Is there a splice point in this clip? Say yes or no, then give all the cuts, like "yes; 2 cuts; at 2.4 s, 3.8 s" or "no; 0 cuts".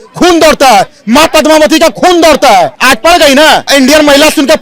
yes; 2 cuts; at 2.8 s, 3.7 s